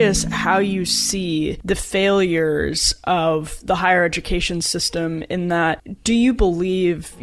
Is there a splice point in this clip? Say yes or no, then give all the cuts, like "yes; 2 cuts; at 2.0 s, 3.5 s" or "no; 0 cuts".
no; 0 cuts